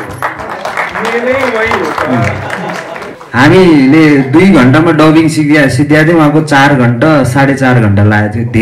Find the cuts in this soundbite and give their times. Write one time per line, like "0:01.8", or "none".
0:03.1